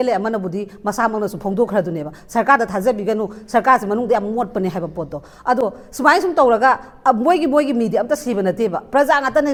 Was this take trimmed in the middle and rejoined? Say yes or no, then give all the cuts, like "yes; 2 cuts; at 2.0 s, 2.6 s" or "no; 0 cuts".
no; 0 cuts